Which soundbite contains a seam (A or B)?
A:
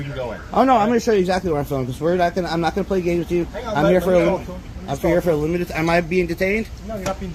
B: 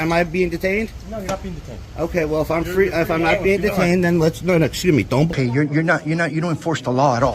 B